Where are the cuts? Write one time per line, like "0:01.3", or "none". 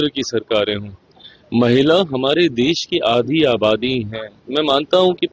none